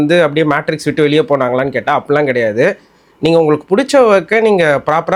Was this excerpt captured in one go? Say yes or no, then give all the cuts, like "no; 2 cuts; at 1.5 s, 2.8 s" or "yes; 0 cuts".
yes; 0 cuts